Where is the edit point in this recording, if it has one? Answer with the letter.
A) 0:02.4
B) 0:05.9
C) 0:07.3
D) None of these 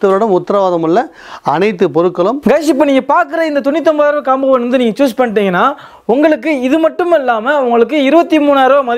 A